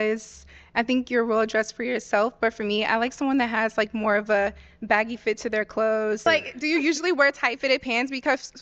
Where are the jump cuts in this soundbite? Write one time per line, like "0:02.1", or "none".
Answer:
0:06.3